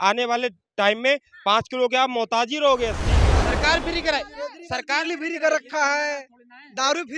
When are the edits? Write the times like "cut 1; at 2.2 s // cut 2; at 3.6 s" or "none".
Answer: cut 1; at 3.3 s